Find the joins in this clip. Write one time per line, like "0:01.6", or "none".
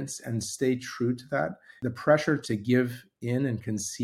0:01.7
0:02.4